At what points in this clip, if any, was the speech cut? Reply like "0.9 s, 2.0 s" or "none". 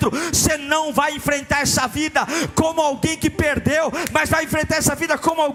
none